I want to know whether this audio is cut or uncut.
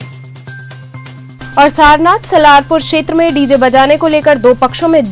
uncut